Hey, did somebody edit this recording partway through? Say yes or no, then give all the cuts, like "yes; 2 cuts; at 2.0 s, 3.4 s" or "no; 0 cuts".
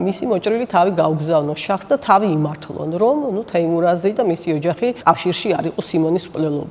yes; 1 cut; at 5.0 s